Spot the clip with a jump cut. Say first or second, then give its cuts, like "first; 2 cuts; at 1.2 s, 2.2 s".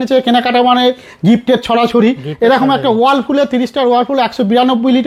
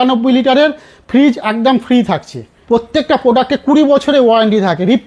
second; 1 cut; at 2.5 s